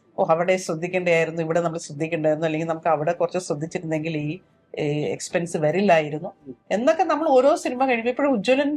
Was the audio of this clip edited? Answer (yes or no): no